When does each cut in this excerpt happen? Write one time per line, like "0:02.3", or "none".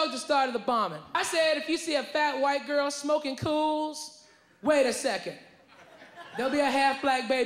0:01.0